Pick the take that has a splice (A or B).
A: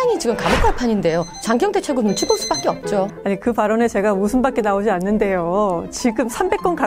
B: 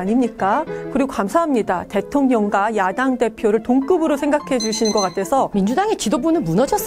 B